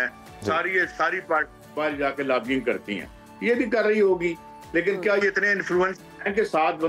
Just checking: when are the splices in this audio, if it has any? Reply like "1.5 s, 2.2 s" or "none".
none